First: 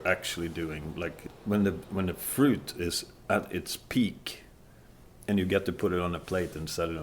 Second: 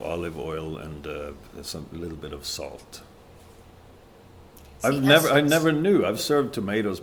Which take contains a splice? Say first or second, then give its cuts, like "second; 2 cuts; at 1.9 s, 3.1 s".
first; 1 cut; at 1.3 s